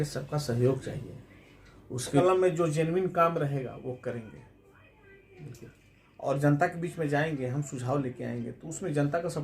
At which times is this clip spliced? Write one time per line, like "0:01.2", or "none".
0:02.2

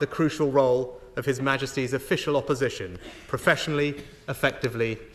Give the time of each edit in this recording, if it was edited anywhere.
none

